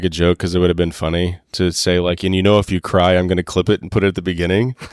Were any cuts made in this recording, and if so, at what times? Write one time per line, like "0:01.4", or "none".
none